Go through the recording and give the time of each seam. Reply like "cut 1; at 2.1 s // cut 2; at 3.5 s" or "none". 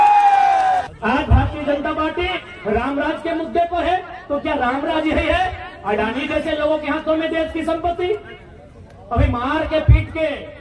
cut 1; at 0.9 s

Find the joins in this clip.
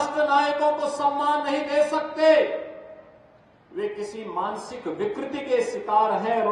none

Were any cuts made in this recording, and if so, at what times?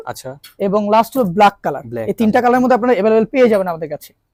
none

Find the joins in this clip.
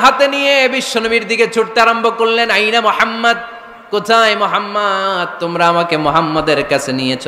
none

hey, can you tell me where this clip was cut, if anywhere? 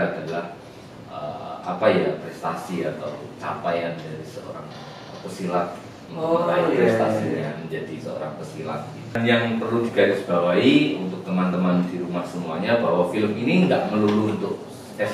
cut 1; at 9.2 s

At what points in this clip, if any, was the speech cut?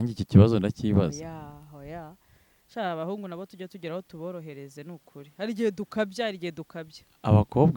none

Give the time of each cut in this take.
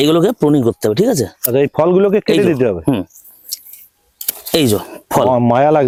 none

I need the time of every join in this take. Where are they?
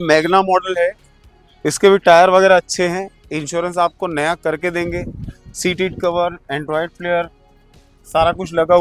none

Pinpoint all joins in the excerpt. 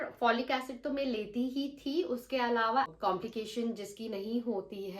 cut 1; at 2.9 s

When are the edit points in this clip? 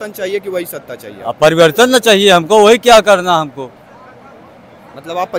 none

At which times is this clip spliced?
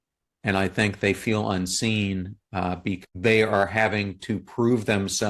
cut 1; at 3.0 s

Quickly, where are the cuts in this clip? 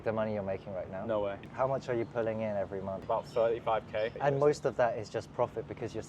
cut 1; at 1.5 s // cut 2; at 3.0 s // cut 3; at 4.1 s

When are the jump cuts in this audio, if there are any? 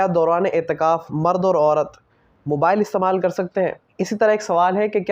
cut 1; at 3.9 s

